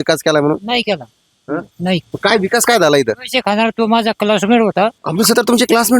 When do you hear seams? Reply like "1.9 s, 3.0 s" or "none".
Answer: 2.1 s, 5.0 s